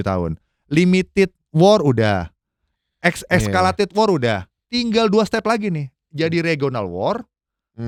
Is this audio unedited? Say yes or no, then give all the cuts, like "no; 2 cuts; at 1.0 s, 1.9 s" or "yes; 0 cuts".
yes; 0 cuts